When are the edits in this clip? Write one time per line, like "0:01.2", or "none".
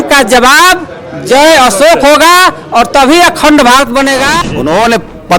0:04.3